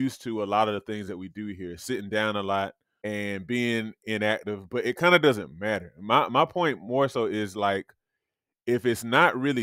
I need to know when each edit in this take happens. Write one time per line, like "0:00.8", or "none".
0:02.9